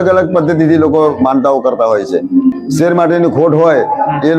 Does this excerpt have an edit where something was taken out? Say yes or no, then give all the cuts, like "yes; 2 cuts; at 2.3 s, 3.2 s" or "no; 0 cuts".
yes; 1 cut; at 2.6 s